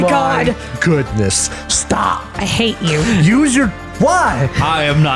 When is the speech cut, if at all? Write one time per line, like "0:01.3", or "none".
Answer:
0:03.8